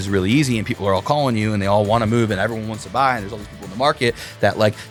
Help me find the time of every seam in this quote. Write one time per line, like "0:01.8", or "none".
none